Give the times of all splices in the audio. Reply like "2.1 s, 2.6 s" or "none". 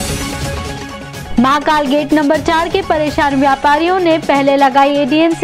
1.2 s